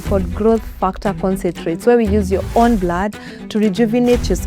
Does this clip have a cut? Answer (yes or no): no